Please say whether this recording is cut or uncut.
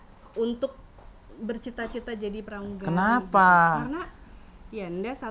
uncut